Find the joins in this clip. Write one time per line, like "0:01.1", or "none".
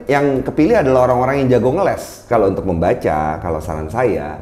0:02.3